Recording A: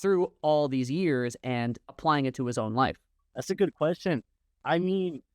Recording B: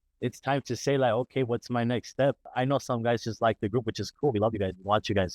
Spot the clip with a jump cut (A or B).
A